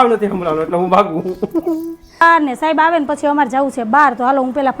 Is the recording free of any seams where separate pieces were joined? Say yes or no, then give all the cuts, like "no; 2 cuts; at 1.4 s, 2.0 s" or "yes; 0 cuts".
no; 1 cut; at 2.2 s